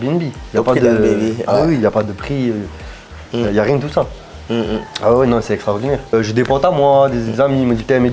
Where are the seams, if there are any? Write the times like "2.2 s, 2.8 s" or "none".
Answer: 6.1 s